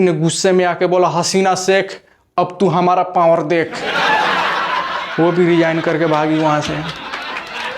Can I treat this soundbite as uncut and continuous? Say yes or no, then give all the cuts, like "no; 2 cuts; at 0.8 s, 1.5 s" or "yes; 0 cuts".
no; 3 cuts; at 3.9 s, 5.1 s, 6.9 s